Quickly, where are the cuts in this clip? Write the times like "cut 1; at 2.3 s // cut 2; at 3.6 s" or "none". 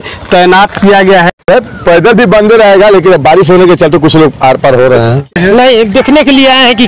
cut 1; at 1.5 s // cut 2; at 5.3 s